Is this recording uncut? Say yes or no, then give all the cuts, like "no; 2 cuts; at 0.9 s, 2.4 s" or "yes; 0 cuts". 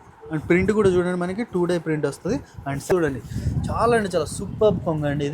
no; 1 cut; at 2.9 s